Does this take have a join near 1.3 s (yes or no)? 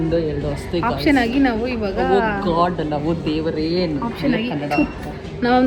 no